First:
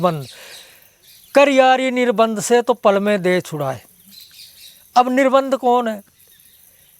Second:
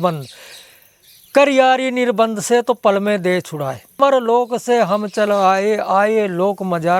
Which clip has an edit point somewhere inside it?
second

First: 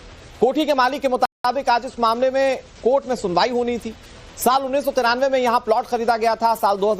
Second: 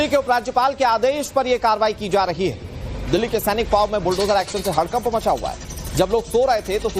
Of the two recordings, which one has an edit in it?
second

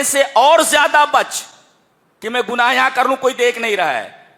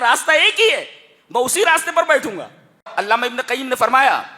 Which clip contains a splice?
second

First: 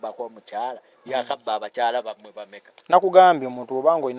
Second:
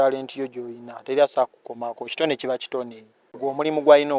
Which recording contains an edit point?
second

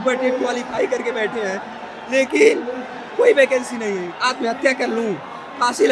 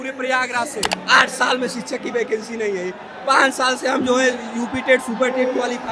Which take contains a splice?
second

